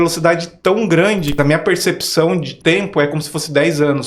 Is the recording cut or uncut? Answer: cut